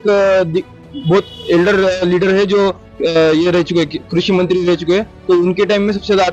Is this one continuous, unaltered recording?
yes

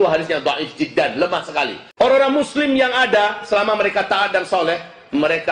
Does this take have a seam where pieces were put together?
yes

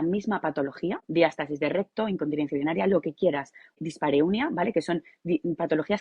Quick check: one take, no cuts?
no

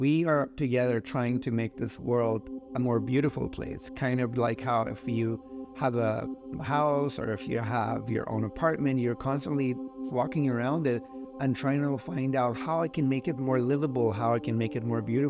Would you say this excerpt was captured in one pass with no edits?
yes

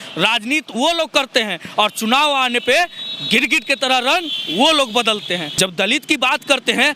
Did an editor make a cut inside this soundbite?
yes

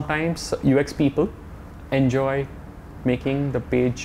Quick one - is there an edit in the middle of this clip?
no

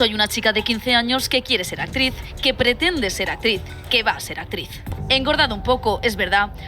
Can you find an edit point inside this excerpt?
yes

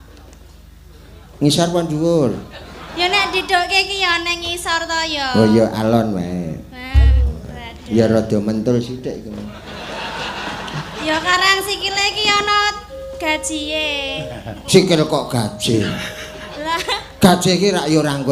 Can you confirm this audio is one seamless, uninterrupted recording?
yes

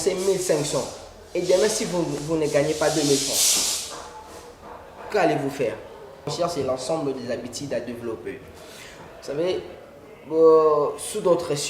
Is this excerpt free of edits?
no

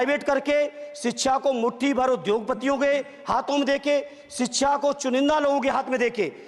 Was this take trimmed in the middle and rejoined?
no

